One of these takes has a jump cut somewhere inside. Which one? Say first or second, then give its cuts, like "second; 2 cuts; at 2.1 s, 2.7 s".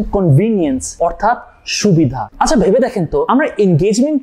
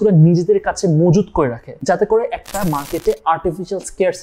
first; 1 cut; at 2.2 s